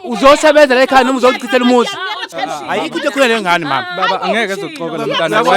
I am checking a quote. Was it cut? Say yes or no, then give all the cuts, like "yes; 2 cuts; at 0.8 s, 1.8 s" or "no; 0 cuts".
yes; 1 cut; at 2.3 s